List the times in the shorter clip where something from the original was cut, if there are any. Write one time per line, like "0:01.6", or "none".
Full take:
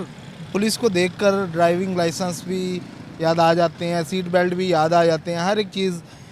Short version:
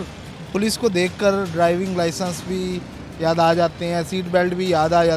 none